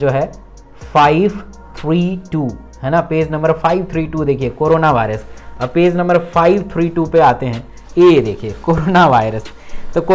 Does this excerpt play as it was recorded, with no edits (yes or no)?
no